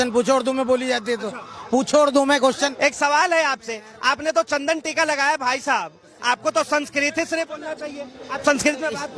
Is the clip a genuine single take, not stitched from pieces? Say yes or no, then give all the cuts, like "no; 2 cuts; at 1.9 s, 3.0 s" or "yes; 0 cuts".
no; 1 cut; at 2.7 s